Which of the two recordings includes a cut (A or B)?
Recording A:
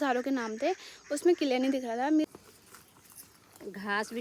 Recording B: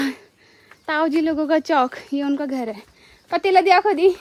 A